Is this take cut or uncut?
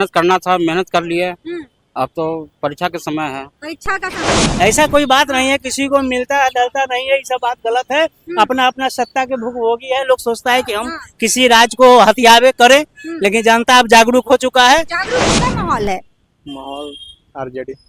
cut